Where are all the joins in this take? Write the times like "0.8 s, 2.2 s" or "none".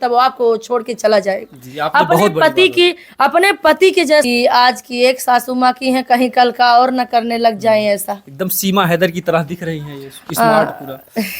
4.2 s

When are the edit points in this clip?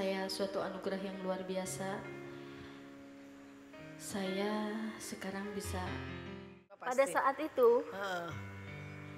6.8 s

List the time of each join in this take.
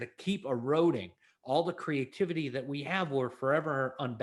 none

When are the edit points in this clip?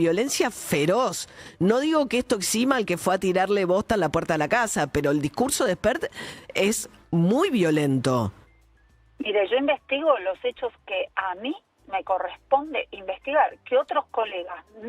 none

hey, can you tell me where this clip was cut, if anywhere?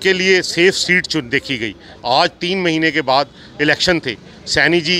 none

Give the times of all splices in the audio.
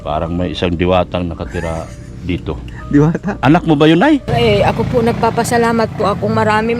4.3 s

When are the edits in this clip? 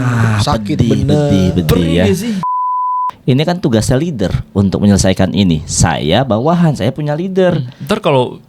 2.8 s

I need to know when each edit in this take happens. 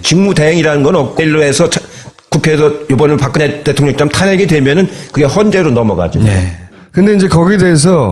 none

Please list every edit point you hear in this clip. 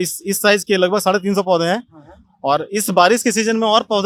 none

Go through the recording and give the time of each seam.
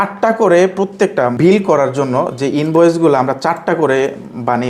1.3 s

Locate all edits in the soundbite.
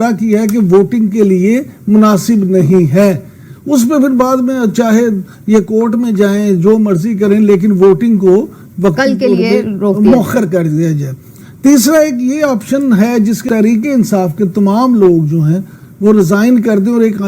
13.5 s

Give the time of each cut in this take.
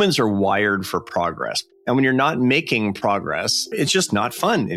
1.6 s, 3.7 s

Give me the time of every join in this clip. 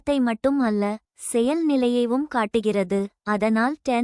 none

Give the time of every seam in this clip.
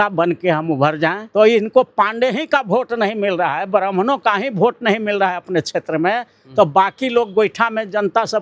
1.2 s

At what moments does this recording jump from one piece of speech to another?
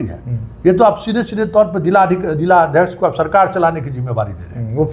none

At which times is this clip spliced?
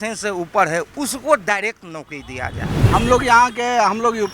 2.8 s

